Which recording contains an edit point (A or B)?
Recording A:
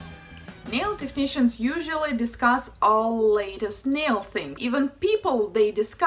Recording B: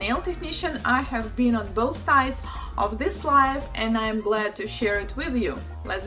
A